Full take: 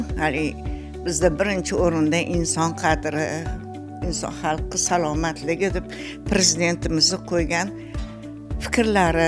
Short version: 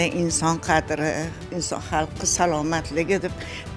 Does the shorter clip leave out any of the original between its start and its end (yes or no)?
yes